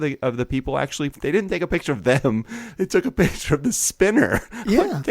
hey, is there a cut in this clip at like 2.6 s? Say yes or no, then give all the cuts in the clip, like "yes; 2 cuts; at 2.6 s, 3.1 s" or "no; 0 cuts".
no; 1 cut; at 1.1 s